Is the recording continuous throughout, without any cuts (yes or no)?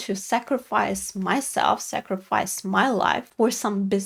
yes